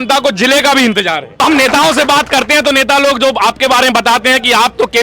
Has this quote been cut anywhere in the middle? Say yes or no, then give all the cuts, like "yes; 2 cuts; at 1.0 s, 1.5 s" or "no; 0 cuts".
yes; 1 cut; at 1.4 s